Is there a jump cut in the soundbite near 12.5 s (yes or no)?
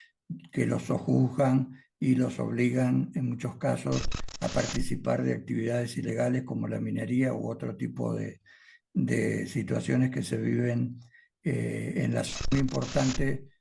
yes